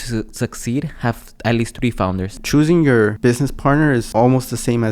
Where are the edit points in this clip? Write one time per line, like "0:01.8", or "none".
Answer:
0:02.3
0:03.2
0:04.1